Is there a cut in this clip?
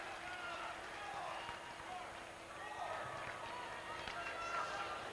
no; 0 cuts

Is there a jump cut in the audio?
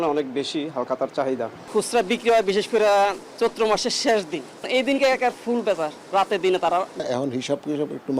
yes; 3 cuts; at 1.6 s, 4.7 s, 7.1 s

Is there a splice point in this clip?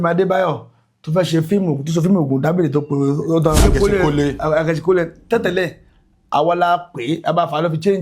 yes; 1 cut; at 3.6 s

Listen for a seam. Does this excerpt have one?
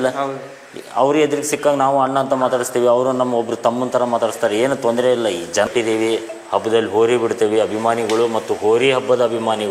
yes; 1 cut; at 5.7 s

